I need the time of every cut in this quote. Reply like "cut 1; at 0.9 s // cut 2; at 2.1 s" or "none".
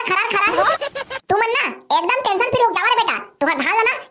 none